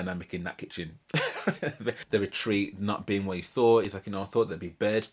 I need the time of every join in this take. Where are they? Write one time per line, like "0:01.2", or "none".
0:02.0